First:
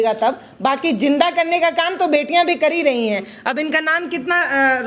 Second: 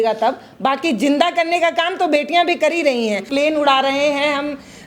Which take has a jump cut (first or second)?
second